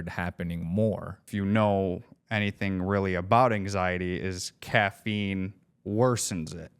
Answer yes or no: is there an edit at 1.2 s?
yes